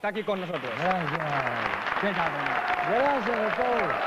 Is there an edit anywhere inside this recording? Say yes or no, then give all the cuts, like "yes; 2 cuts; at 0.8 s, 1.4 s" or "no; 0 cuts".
yes; 1 cut; at 3.0 s